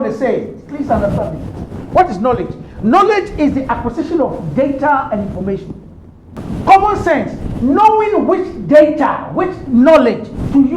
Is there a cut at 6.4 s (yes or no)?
yes